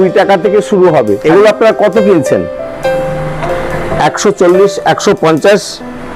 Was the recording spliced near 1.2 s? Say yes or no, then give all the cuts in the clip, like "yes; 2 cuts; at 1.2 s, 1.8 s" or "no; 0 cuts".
yes; 1 cut; at 1.2 s